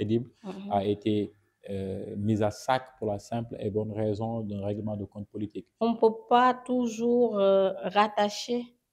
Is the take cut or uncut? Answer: cut